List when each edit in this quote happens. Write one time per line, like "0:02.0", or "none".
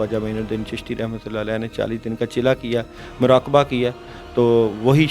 none

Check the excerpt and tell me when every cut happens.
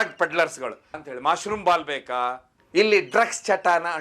0:00.9
0:02.5

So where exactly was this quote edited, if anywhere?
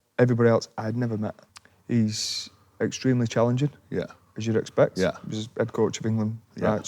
0:01.5

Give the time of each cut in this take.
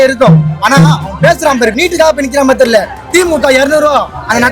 0:01.8

